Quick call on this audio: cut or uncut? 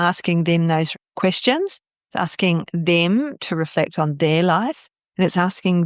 cut